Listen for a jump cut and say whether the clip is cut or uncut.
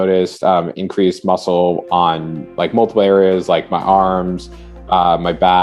uncut